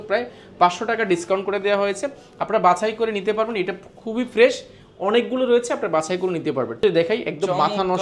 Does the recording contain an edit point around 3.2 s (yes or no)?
no